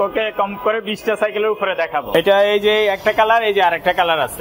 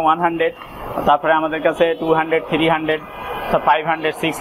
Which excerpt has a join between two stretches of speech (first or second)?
first